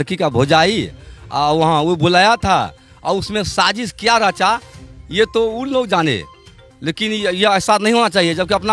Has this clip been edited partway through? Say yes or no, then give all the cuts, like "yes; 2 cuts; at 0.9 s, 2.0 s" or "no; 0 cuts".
no; 0 cuts